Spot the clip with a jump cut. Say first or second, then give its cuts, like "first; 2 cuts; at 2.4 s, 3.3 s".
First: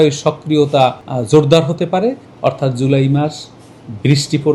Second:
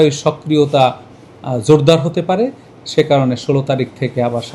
first; 2 cuts; at 1.1 s, 2.3 s